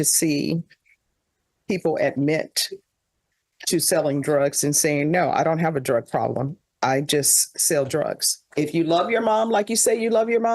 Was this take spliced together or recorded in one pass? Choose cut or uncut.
cut